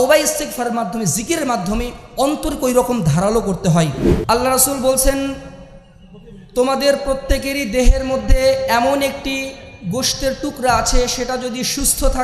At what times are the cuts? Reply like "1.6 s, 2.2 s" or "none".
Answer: 4.1 s